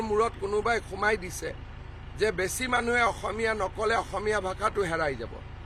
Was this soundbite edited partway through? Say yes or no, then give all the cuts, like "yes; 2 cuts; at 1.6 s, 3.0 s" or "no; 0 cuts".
no; 0 cuts